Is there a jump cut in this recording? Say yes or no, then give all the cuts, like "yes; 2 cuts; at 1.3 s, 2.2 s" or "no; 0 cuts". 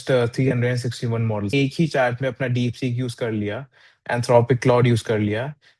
yes; 1 cut; at 1.5 s